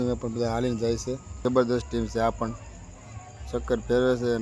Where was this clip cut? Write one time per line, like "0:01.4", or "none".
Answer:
0:01.4